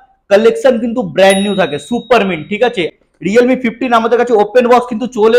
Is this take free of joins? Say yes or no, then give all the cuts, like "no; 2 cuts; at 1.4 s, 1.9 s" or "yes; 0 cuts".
no; 1 cut; at 2.9 s